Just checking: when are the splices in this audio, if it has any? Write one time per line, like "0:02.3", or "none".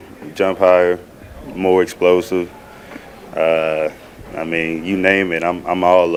none